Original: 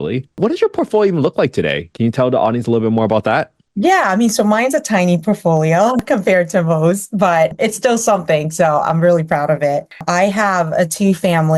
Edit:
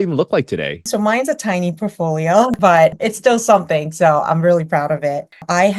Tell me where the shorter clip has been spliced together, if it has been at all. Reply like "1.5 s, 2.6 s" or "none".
0.9 s, 2.6 s